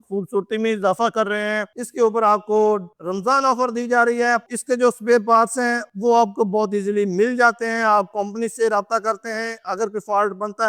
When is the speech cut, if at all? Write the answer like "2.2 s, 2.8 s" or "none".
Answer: 1.7 s, 4.5 s

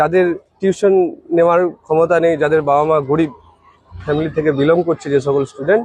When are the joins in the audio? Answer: none

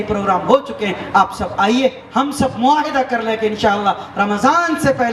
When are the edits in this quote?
none

